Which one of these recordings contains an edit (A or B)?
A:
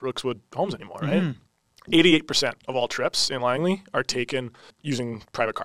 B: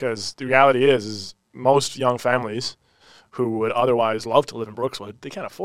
A